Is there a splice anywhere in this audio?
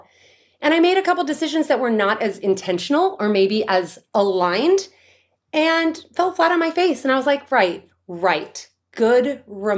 no; 0 cuts

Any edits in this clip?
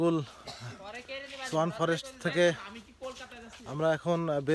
no; 0 cuts

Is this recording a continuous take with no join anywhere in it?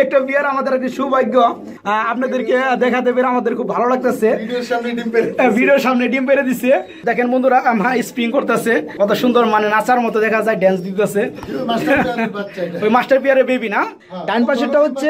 no; 2 cuts; at 7.0 s, 14.0 s

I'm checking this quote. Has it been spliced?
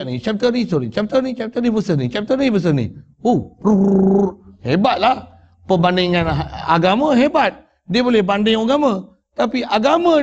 no; 0 cuts

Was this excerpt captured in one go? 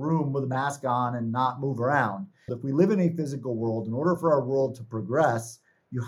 no; 1 cut; at 2.6 s

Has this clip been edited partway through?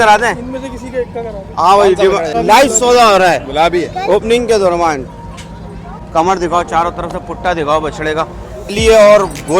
yes; 3 cuts; at 2.3 s, 5.9 s, 8.7 s

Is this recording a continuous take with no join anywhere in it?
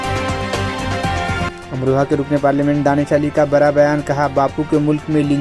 no; 1 cut; at 1.5 s

